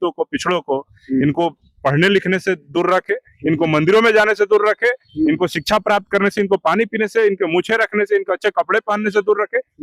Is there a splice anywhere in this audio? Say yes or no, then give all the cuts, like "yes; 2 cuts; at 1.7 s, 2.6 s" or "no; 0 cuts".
no; 0 cuts